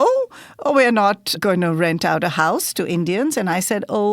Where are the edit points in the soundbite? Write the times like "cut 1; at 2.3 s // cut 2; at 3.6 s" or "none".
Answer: cut 1; at 1.4 s